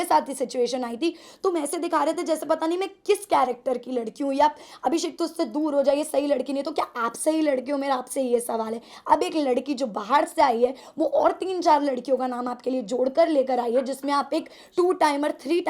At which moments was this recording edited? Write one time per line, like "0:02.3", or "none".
none